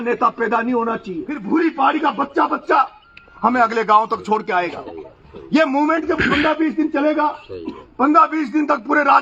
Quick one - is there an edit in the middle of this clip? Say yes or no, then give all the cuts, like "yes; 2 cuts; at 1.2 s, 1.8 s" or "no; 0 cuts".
yes; 1 cut; at 1.4 s